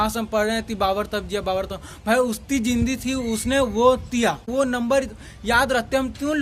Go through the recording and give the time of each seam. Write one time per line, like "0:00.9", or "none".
none